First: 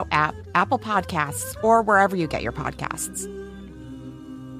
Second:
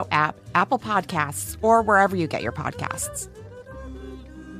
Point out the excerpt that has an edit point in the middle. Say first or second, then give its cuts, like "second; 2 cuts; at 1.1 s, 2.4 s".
first; 1 cut; at 2.9 s